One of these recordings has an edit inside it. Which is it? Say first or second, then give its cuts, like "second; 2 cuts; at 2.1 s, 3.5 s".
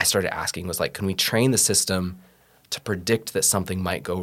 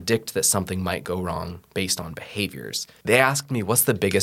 second; 1 cut; at 2.9 s